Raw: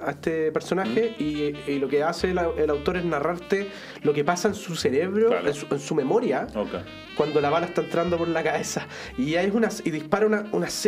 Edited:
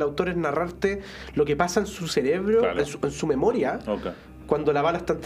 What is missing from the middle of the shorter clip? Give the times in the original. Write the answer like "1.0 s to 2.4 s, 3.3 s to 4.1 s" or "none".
none